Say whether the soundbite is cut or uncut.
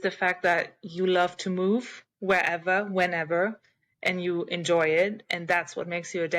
uncut